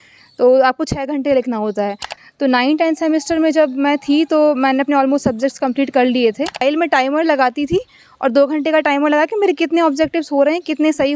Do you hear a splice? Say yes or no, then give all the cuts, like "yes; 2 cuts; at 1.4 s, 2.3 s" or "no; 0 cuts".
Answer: yes; 2 cuts; at 2.1 s, 6.6 s